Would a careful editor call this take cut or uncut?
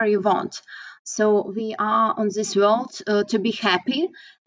uncut